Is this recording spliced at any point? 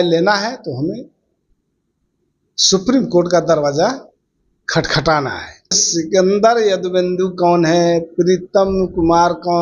yes; 1 cut; at 5.8 s

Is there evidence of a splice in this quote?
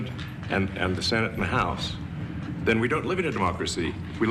no; 0 cuts

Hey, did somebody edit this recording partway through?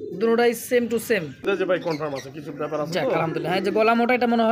yes; 1 cut; at 1.4 s

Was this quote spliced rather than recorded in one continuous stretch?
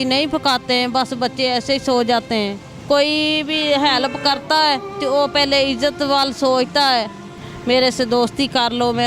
yes; 2 cuts; at 2.7 s, 7.5 s

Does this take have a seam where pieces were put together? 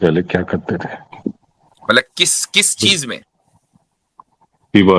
yes; 1 cut; at 1.1 s

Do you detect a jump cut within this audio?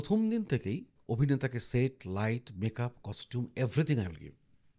yes; 1 cut; at 0.9 s

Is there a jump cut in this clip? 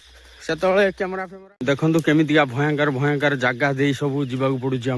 yes; 1 cut; at 1.2 s

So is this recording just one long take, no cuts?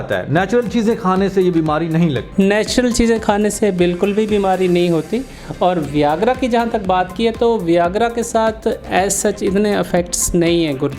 no; 1 cut; at 2.2 s

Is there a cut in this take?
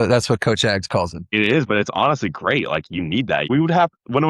yes; 2 cuts; at 1.2 s, 3.5 s

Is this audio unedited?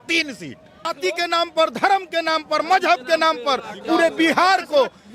no; 1 cut; at 0.9 s

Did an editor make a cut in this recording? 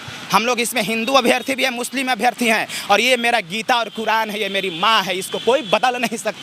no; 0 cuts

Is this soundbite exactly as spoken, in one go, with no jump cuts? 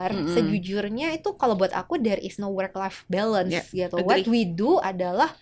yes; 0 cuts

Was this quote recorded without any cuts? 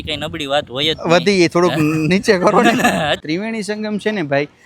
no; 1 cut; at 3.2 s

